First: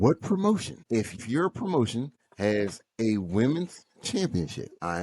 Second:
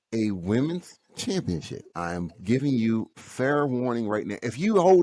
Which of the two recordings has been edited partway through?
first; 1 cut; at 1.0 s

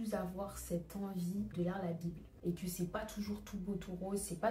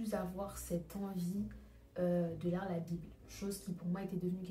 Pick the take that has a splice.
first; 1 cut; at 1.9 s

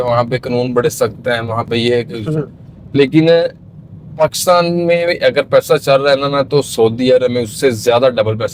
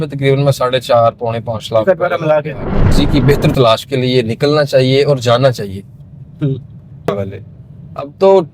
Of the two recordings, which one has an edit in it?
second; 2 cuts; at 2.9 s, 7.1 s

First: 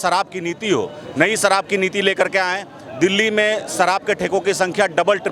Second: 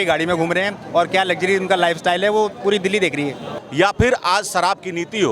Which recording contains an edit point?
second; 1 cut; at 3.5 s

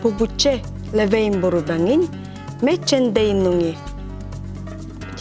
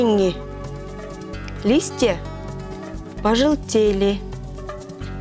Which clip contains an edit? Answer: second; 1 cut; at 4.2 s

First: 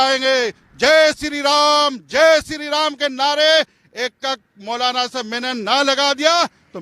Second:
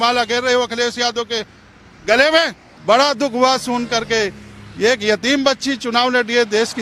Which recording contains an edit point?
second; 1 cut; at 2.7 s

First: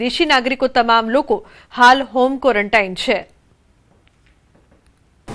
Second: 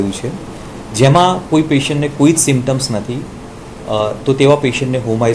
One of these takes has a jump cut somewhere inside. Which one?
second; 1 cut; at 2.4 s

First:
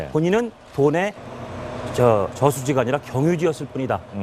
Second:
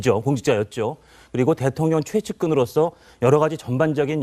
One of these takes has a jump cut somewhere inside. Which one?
first; 1 cut; at 2.2 s

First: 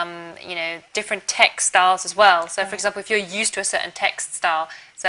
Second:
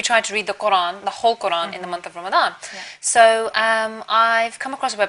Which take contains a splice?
second; 1 cut; at 2.6 s

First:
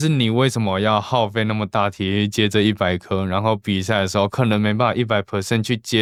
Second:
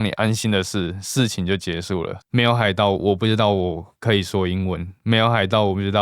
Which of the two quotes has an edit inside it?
second; 1 cut; at 2.2 s

